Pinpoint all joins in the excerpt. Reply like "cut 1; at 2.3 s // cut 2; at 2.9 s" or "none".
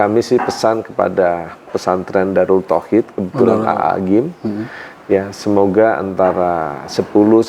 cut 1; at 1.7 s

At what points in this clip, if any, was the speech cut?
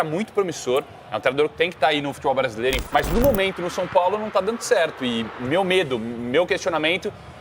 cut 1; at 2.8 s

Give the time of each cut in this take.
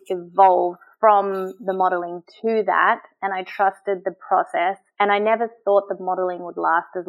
none

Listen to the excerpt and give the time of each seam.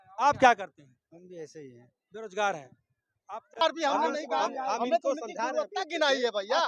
cut 1; at 3.6 s

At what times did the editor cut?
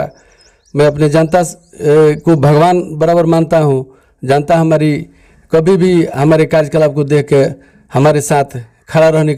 none

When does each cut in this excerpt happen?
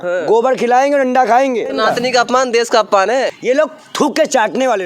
cut 1; at 1.7 s // cut 2; at 3.3 s

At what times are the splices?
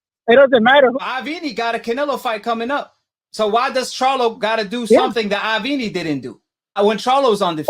cut 1; at 0.9 s // cut 2; at 6.7 s

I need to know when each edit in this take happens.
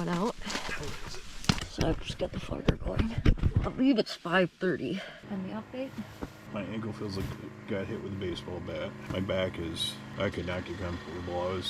cut 1; at 1.1 s // cut 2; at 3.4 s // cut 3; at 5.2 s // cut 4; at 6.4 s // cut 5; at 9.0 s // cut 6; at 10.0 s

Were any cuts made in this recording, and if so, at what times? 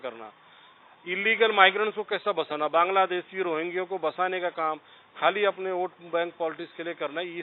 none

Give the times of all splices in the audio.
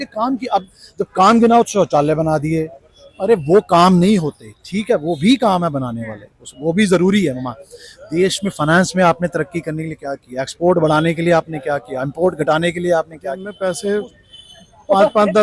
cut 1; at 13.5 s

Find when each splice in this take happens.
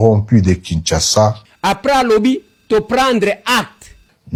none

